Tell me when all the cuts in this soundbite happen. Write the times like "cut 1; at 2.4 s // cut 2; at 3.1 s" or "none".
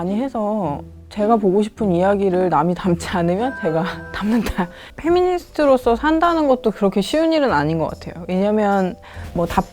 cut 1; at 0.9 s // cut 2; at 4.8 s